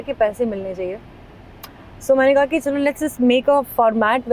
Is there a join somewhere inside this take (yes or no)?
no